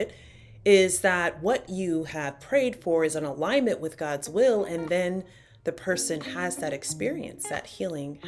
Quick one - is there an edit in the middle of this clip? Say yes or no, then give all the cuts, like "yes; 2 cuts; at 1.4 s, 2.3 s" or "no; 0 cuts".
no; 0 cuts